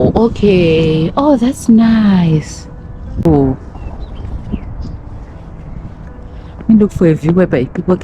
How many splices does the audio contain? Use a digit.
1